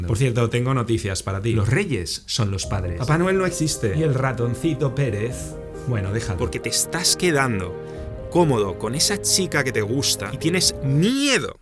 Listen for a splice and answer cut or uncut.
cut